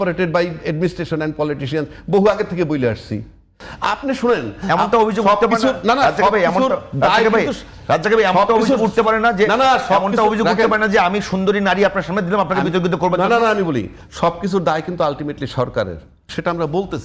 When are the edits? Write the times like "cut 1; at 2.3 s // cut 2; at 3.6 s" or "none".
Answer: none